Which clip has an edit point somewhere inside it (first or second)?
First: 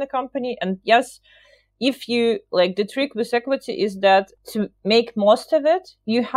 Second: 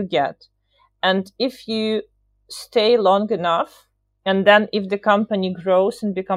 first